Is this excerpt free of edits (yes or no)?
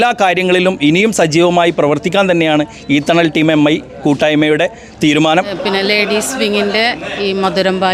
no